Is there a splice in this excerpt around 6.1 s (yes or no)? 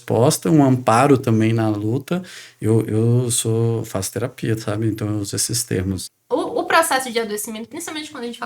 yes